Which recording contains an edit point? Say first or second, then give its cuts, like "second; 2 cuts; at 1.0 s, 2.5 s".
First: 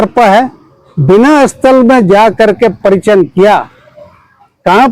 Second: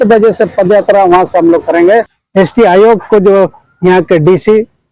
second; 1 cut; at 2.2 s